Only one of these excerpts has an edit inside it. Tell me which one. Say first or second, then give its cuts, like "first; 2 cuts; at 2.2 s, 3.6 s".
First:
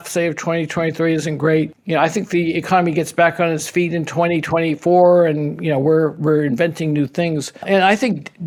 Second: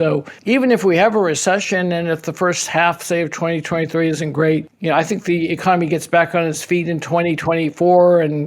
second; 1 cut; at 1.7 s